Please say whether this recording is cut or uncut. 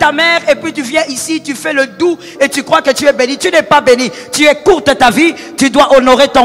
uncut